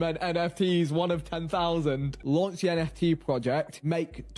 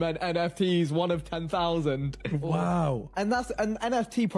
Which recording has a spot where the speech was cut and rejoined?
first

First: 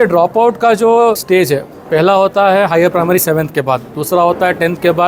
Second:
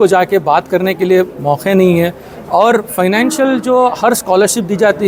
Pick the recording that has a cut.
first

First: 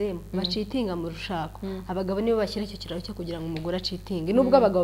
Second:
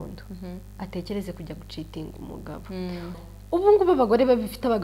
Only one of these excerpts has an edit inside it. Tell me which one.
second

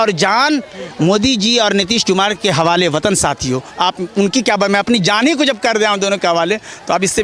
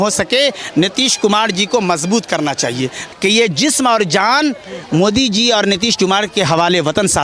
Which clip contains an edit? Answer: second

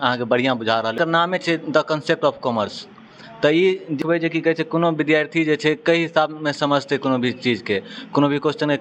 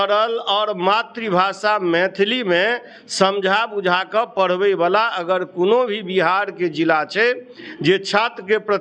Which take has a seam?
first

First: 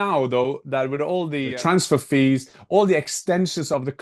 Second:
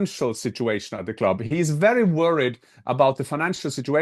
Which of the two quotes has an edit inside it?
first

